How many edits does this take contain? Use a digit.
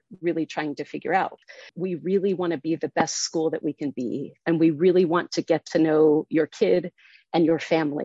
1